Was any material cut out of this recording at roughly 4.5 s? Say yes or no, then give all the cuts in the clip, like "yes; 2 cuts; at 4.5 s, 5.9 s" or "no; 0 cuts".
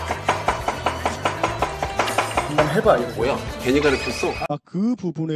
yes; 1 cut; at 4.5 s